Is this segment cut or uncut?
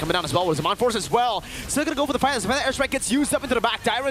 uncut